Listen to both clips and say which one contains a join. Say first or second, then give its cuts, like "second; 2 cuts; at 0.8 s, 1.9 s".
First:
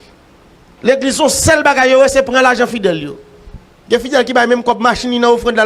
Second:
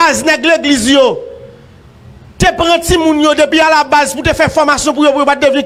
first; 1 cut; at 3.3 s